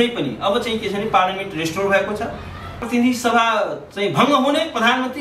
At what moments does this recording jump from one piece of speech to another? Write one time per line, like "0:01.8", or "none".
0:02.8